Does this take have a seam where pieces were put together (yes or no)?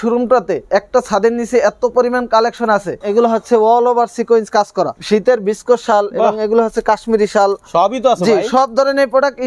yes